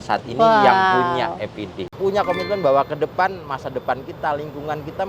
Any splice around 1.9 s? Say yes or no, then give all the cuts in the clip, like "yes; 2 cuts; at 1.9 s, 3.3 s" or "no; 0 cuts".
yes; 1 cut; at 1.9 s